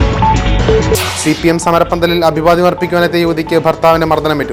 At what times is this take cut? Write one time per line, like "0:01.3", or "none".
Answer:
0:00.9